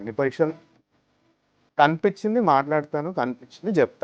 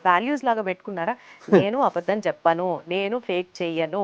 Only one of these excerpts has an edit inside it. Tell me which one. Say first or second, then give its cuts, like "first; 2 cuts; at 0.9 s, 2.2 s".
first; 1 cut; at 1.2 s